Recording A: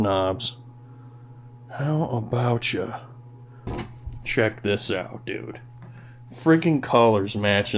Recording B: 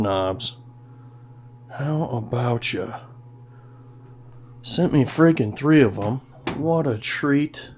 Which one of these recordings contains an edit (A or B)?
A